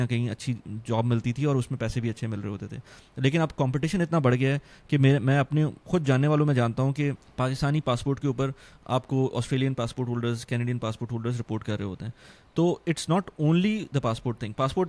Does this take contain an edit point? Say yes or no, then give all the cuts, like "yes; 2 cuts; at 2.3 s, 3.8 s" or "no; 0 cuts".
yes; 1 cut; at 7.2 s